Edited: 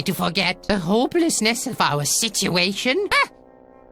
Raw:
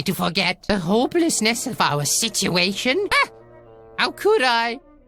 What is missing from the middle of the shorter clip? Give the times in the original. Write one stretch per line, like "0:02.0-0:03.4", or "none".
none